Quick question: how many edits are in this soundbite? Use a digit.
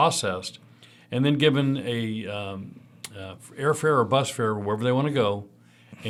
0